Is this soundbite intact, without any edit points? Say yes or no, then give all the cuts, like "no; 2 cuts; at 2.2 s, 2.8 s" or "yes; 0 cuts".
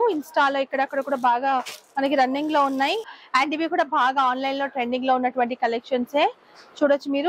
no; 1 cut; at 3.1 s